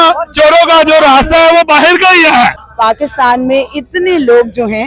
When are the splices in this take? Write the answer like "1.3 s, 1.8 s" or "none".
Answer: 2.6 s